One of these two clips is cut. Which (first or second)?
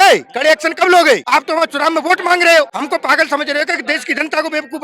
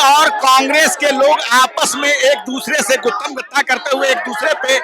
first